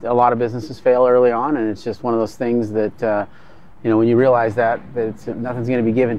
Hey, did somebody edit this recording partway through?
no; 0 cuts

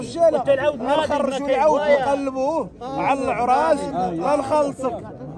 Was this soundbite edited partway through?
no; 0 cuts

